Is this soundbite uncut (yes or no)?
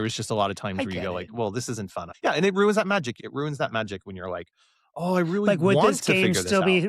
no